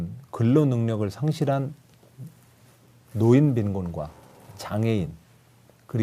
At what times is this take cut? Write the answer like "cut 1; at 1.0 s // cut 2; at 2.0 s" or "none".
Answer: cut 1; at 2.7 s